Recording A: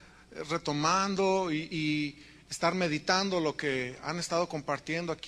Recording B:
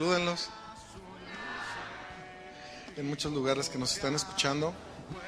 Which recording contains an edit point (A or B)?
A